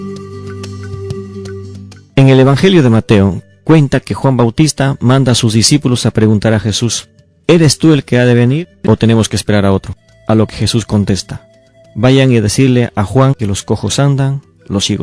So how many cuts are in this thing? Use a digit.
1